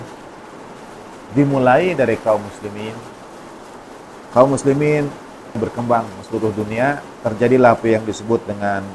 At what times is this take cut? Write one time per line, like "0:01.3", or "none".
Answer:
0:05.6